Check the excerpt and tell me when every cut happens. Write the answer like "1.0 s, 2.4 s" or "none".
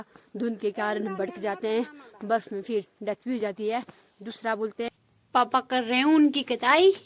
4.9 s